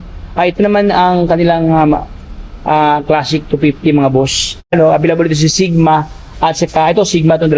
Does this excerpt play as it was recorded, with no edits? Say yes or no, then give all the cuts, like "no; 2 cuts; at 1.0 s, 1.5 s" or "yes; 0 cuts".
no; 1 cut; at 4.7 s